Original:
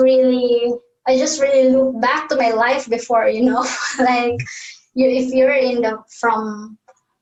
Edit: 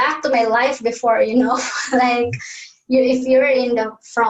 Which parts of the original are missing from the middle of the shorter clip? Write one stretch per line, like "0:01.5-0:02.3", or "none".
none